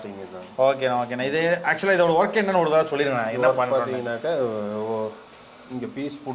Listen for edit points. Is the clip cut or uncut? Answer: uncut